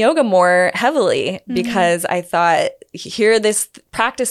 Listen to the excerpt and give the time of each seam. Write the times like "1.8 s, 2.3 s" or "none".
none

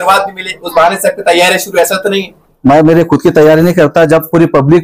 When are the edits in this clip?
none

